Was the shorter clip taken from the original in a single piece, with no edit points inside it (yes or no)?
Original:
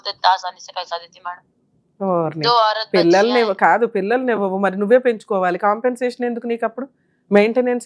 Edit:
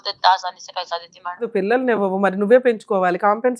no